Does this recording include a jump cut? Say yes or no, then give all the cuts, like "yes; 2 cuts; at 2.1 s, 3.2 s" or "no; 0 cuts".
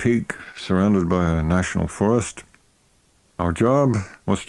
no; 0 cuts